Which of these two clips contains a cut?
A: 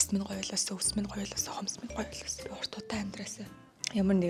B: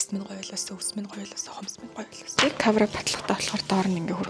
B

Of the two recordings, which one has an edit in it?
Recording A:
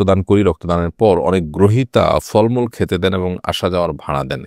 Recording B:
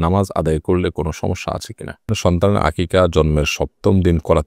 B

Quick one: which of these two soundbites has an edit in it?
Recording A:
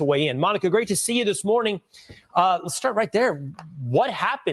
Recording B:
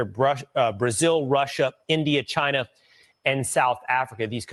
A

